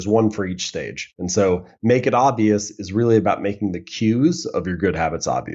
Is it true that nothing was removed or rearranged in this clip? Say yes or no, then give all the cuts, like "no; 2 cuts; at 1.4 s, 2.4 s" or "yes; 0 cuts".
yes; 0 cuts